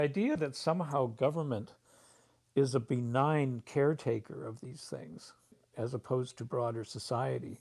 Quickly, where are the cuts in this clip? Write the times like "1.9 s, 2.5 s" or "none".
5.6 s